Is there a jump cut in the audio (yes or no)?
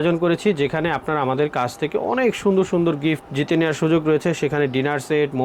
no